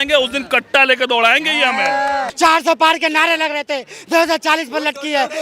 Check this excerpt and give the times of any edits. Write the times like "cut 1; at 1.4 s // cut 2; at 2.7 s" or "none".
cut 1; at 2.3 s